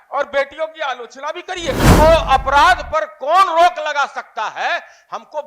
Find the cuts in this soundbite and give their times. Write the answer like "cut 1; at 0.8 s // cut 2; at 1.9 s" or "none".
cut 1; at 1.9 s